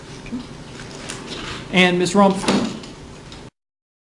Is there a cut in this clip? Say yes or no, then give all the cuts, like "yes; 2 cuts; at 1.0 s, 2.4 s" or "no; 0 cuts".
no; 0 cuts